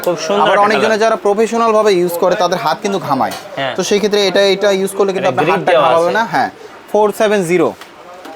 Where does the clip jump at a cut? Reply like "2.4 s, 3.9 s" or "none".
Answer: 6.7 s